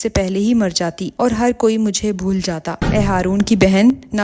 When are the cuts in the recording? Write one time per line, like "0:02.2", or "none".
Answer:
0:02.9

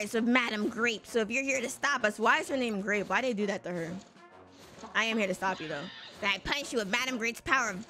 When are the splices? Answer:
none

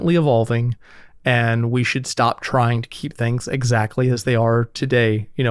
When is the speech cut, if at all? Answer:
none

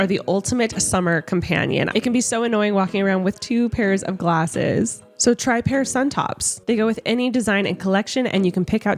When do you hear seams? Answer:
none

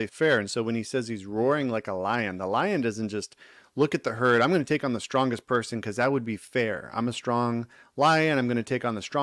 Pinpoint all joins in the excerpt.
none

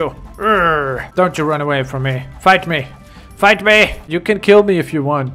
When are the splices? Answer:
0:01.1
0:04.0

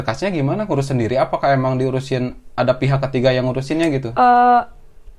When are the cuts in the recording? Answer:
none

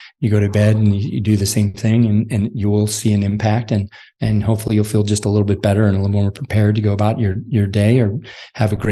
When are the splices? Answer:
none

